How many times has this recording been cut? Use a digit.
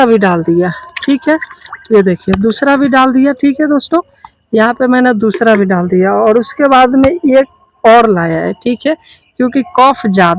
0